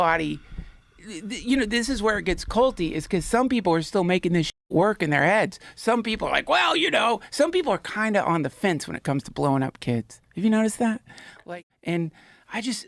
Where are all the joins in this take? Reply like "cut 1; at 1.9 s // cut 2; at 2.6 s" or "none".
cut 1; at 11.3 s

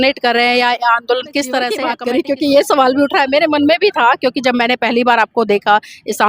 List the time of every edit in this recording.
cut 1; at 1.9 s

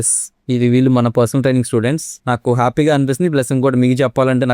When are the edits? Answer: cut 1; at 2.1 s

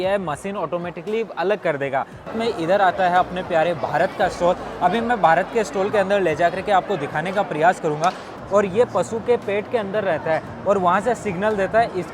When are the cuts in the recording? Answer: cut 1; at 2.3 s // cut 2; at 8.3 s

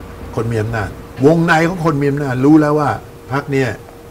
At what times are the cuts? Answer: cut 1; at 1.0 s // cut 2; at 3.1 s

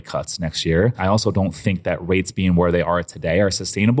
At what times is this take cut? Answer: none

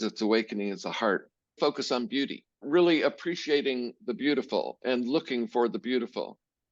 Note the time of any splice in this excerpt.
cut 1; at 1.6 s // cut 2; at 2.6 s

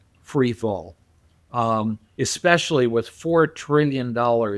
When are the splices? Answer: none

